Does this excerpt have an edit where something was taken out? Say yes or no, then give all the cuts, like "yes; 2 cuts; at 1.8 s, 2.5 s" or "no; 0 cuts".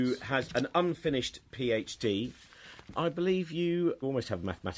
yes; 1 cut; at 3.1 s